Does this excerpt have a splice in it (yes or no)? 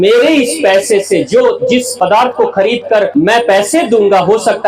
yes